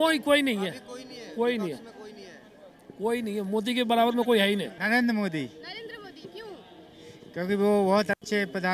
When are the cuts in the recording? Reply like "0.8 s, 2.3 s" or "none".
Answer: 4.8 s